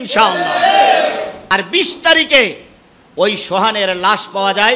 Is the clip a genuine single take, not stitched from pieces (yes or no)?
no